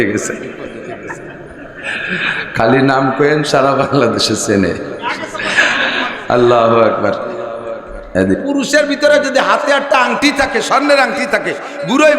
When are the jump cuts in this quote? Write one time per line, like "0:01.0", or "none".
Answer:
0:08.3